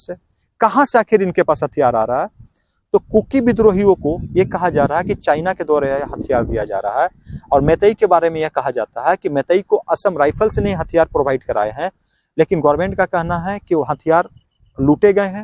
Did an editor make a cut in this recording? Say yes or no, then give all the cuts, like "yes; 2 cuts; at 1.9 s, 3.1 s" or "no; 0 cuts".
no; 0 cuts